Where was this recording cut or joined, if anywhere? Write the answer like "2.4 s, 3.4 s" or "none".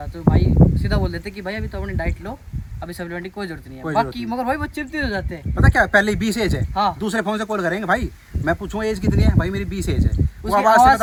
none